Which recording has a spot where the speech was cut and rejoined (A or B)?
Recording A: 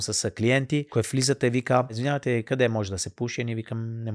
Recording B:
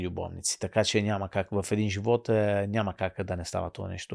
A